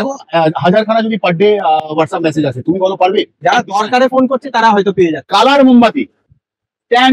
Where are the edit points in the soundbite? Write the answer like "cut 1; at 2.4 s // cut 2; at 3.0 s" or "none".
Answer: cut 1; at 5.2 s